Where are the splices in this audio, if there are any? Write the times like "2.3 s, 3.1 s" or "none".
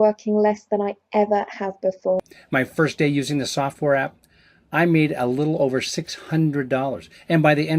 2.2 s